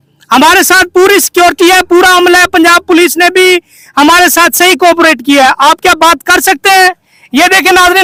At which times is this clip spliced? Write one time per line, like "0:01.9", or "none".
none